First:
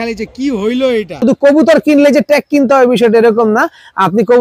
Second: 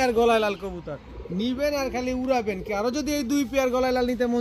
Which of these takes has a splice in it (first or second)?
first